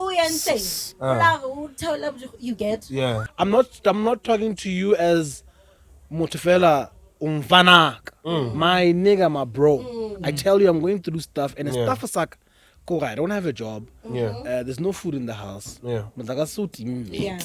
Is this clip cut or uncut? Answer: cut